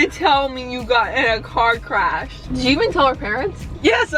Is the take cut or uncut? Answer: cut